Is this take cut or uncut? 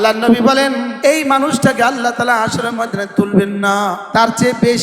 cut